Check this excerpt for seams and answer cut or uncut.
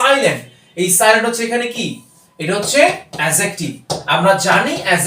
uncut